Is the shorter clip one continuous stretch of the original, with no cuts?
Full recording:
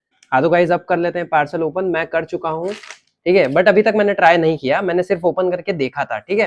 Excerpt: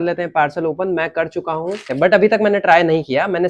no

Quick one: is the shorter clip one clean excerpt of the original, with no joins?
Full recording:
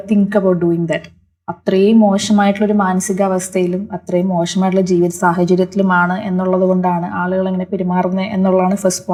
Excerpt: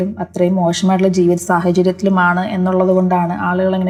yes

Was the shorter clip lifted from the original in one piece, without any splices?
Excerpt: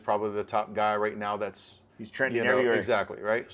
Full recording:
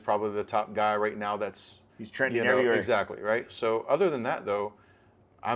yes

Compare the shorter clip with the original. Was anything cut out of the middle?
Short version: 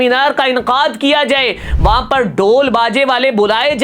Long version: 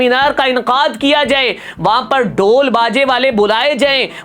no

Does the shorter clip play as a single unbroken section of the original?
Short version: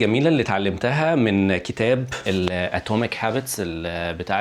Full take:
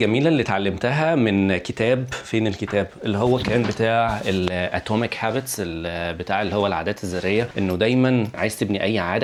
no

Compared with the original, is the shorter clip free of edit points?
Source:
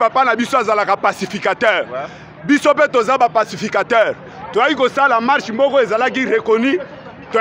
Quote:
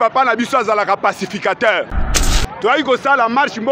no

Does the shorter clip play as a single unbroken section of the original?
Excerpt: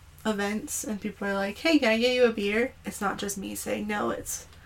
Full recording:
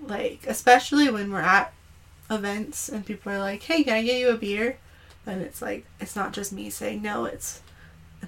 no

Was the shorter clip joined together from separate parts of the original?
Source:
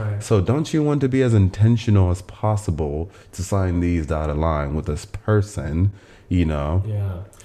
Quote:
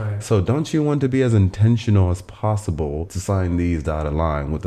yes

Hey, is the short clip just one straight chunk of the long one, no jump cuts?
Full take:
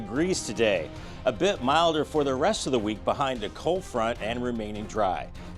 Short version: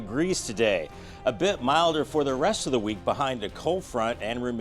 yes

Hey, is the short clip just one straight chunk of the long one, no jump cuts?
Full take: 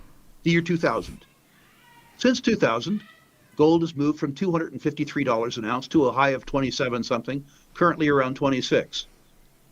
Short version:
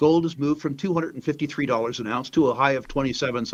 yes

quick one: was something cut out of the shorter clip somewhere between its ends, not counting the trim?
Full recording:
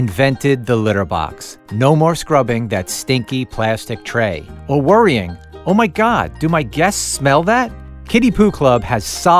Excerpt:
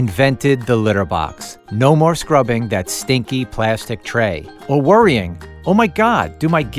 no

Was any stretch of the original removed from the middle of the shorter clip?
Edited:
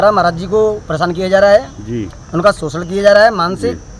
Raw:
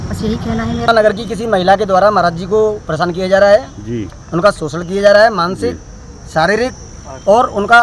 no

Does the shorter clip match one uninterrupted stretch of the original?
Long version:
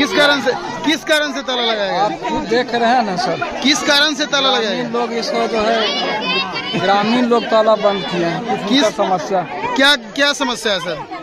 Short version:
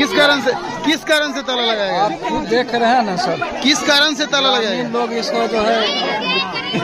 yes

